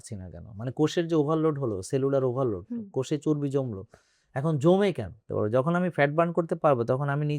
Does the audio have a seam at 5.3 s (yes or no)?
yes